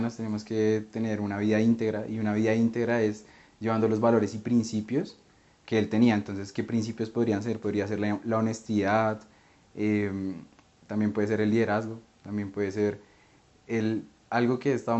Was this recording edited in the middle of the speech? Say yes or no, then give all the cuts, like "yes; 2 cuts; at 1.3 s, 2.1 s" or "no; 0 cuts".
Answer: no; 0 cuts